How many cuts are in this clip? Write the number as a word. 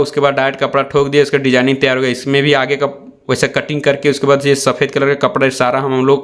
zero